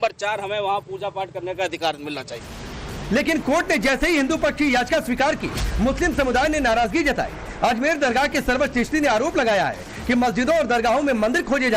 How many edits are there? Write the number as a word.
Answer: one